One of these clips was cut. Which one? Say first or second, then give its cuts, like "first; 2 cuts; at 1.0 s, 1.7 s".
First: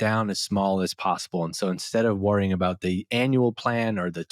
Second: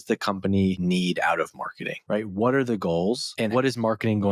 second; 3 cuts; at 0.8 s, 1.9 s, 3.4 s